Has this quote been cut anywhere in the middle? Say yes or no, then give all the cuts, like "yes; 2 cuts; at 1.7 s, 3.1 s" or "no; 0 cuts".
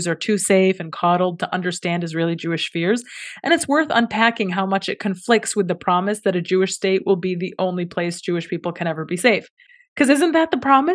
no; 0 cuts